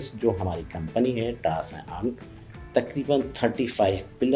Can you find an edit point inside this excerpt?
no; 0 cuts

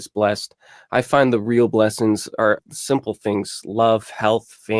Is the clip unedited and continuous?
no; 1 cut; at 2.6 s

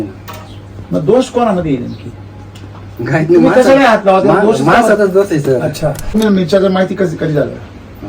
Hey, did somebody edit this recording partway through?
yes; 2 cuts; at 2.9 s, 6.1 s

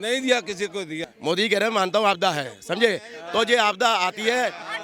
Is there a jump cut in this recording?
yes; 1 cut; at 1.0 s

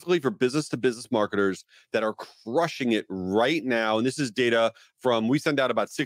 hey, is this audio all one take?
yes; 0 cuts

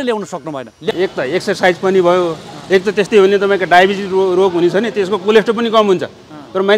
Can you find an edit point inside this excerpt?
yes; 1 cut; at 0.9 s

